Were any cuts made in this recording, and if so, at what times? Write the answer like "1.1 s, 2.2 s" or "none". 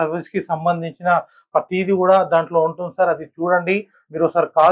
none